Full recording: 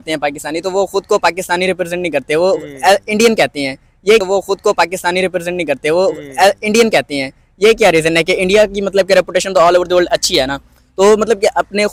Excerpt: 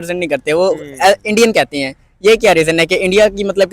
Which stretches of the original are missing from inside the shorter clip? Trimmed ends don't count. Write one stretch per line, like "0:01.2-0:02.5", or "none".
0:04.2-0:07.7